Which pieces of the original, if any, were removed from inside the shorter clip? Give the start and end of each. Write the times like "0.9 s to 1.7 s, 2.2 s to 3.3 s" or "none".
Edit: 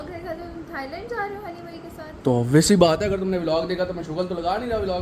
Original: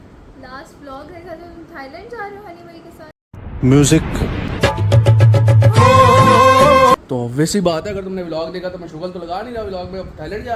3.2 s to 7.1 s